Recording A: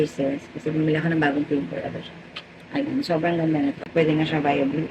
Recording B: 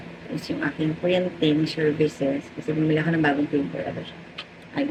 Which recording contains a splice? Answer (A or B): A